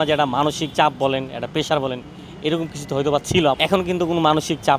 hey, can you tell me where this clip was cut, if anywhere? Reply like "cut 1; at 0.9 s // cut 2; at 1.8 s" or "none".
cut 1; at 3.5 s